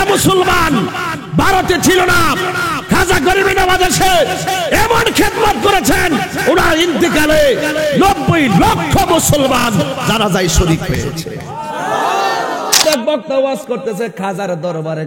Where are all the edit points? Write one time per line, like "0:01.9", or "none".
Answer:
0:12.8